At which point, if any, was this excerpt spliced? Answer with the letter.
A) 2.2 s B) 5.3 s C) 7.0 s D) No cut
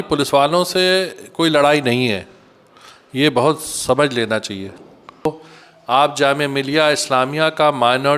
B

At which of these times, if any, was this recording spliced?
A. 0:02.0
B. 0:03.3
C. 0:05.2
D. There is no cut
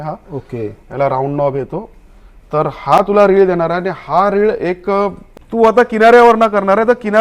C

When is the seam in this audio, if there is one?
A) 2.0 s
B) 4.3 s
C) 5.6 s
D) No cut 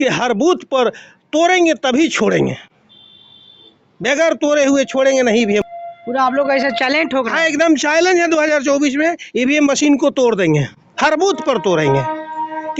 C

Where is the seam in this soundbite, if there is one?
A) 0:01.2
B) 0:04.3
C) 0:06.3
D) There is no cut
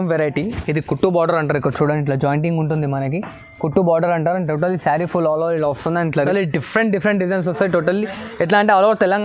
C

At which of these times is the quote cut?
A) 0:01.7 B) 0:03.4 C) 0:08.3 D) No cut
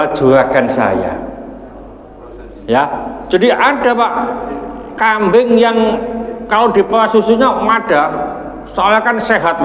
D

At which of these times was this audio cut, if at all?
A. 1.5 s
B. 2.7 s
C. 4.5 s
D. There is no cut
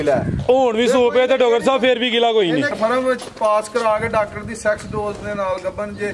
B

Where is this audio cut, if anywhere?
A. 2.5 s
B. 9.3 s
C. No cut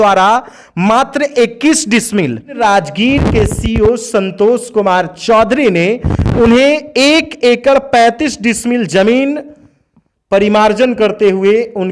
A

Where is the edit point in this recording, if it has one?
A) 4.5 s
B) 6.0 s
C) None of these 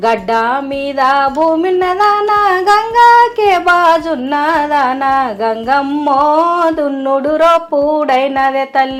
C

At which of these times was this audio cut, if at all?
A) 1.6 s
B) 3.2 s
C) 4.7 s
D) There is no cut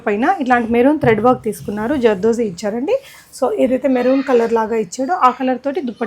D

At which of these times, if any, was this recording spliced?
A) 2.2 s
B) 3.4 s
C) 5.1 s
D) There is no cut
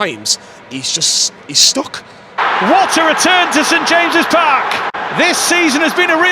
A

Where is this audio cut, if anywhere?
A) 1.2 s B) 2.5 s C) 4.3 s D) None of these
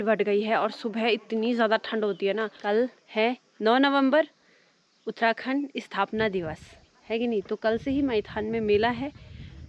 B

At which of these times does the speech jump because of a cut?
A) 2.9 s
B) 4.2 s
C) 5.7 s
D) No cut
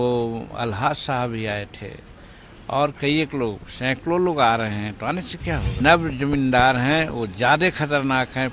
C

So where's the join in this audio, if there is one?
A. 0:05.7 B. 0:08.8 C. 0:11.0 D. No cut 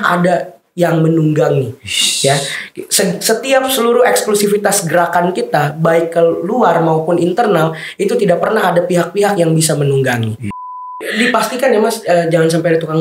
C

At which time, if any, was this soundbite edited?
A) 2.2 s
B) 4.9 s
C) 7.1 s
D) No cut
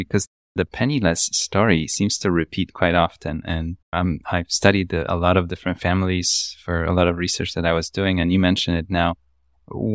D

